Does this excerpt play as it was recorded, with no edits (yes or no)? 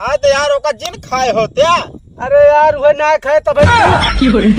no